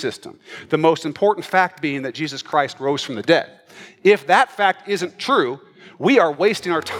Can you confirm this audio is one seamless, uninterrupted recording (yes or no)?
yes